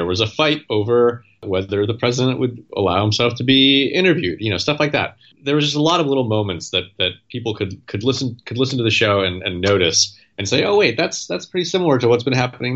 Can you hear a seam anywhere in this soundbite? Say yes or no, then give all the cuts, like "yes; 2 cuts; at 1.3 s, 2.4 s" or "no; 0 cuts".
yes; 3 cuts; at 1.4 s, 2.6 s, 5.3 s